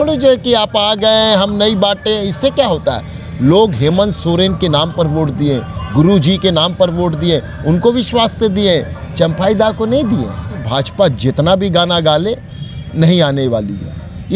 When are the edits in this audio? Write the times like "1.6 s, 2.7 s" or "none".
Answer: 10.6 s